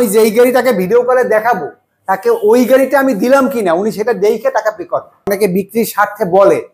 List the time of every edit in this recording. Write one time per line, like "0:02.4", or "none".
0:05.3